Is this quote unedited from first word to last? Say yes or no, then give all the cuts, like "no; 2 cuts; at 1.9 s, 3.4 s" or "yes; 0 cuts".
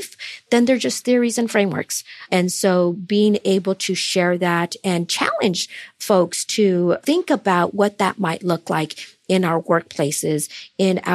yes; 0 cuts